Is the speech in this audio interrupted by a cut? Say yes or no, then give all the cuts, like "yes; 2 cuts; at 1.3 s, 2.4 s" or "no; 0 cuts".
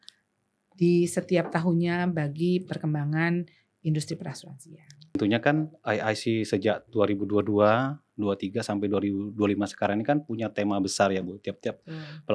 yes; 1 cut; at 5.2 s